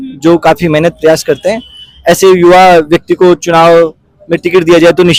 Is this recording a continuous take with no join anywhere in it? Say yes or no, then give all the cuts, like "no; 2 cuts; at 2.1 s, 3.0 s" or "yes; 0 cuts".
yes; 0 cuts